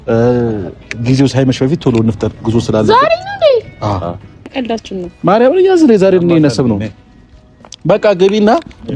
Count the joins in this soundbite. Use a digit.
1